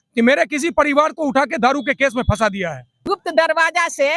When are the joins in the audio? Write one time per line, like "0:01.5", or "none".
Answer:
0:03.0